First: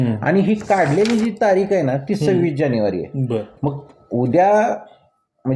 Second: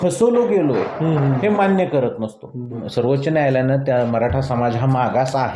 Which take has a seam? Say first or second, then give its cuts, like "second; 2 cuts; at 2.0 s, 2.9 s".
second; 1 cut; at 2.8 s